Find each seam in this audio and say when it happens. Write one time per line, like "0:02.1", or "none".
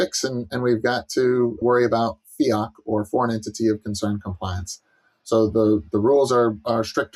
0:01.6